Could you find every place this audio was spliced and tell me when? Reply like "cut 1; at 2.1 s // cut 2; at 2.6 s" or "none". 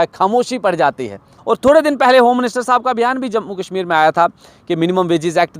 cut 1; at 1.3 s

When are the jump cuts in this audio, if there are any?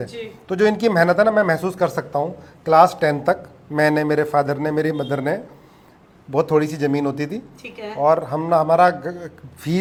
none

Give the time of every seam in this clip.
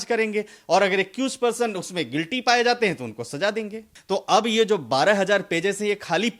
cut 1; at 3.9 s

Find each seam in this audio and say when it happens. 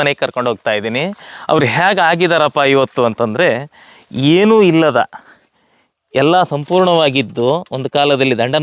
none

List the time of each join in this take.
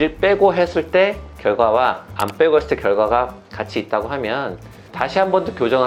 none

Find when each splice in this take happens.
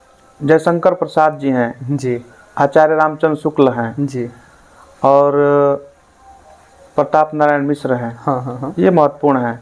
none

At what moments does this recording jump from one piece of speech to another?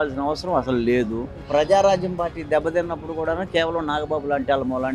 cut 1; at 1.4 s

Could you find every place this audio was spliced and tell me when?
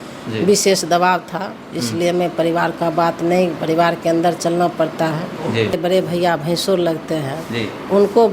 cut 1; at 5.7 s

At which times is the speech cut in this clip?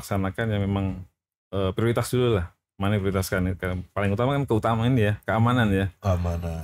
none

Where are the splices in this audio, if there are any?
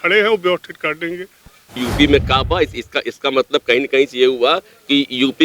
cut 1; at 1.9 s

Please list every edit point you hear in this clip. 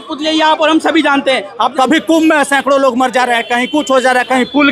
cut 1; at 1.5 s

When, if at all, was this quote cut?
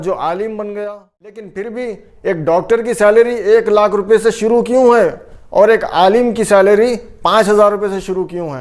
cut 1; at 1.7 s

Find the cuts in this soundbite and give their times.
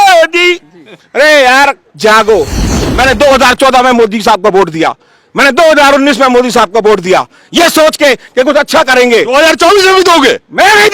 cut 1; at 2.9 s

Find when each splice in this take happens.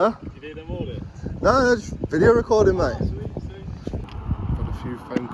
cut 1; at 4.0 s

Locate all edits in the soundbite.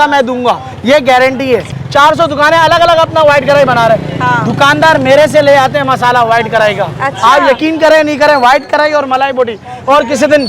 cut 1; at 1.8 s

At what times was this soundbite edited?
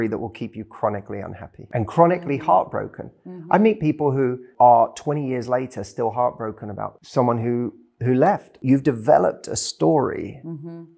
cut 1; at 1.5 s // cut 2; at 4.5 s // cut 3; at 7.0 s // cut 4; at 8.6 s

